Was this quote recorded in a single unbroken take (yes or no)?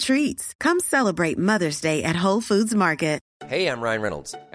no